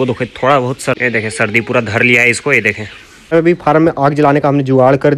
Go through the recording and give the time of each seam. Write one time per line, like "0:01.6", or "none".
0:01.0
0:03.3

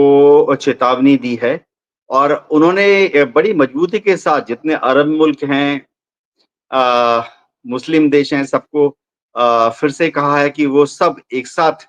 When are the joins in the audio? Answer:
none

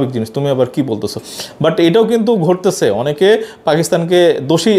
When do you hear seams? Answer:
none

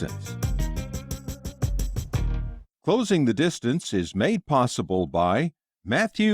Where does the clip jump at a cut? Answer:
0:02.5

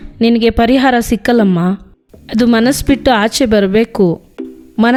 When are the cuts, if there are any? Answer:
none

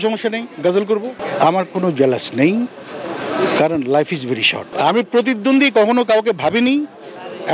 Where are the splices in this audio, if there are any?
0:01.1
0:04.7

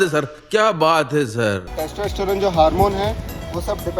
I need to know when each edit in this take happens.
0:01.6

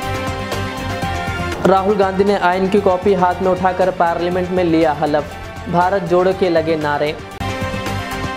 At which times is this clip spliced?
none

